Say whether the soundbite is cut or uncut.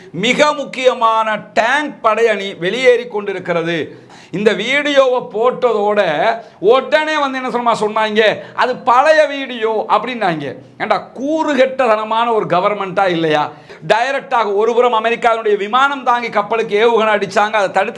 cut